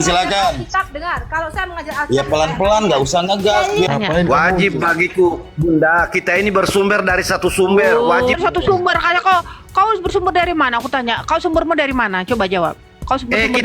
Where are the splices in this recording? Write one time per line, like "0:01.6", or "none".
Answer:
0:03.9
0:08.4